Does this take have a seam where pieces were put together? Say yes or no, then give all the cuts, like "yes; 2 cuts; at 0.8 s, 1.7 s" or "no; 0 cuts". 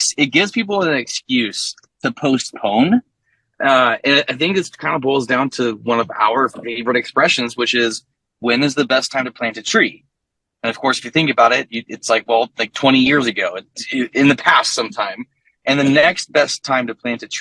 no; 0 cuts